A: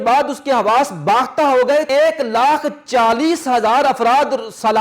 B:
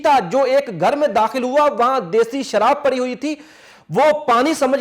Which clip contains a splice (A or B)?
A